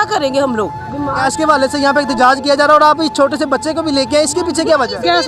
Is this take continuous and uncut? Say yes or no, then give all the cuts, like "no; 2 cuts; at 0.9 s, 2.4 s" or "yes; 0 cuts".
no; 1 cut; at 1.3 s